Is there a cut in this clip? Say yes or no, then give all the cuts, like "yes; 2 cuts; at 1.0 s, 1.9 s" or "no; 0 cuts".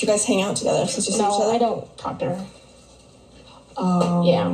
no; 0 cuts